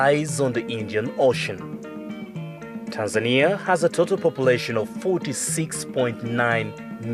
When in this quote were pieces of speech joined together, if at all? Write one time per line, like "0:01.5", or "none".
0:02.1